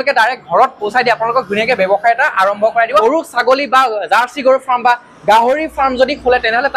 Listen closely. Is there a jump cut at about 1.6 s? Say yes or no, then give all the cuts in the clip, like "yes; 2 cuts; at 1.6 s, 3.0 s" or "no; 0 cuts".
no; 1 cut; at 3.0 s